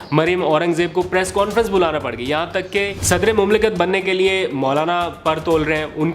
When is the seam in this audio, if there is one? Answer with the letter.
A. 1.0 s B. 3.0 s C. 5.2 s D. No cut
B